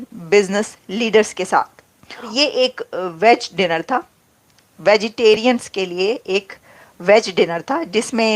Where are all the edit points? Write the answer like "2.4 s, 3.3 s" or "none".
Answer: 2.3 s

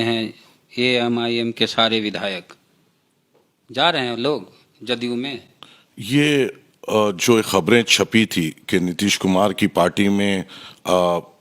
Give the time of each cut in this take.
none

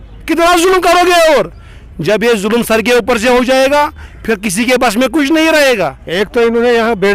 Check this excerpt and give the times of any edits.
6.0 s

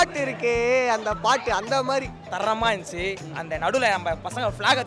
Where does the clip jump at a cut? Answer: 2.2 s

